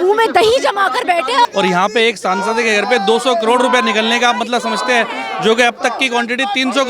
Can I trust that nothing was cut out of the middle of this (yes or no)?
no